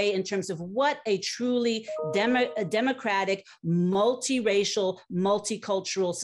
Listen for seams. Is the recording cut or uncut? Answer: uncut